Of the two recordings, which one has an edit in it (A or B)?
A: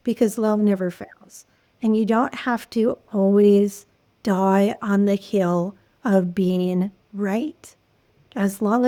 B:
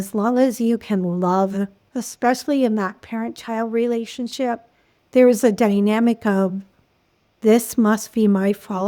B